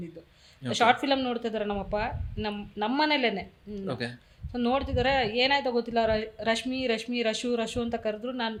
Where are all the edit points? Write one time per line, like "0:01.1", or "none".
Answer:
none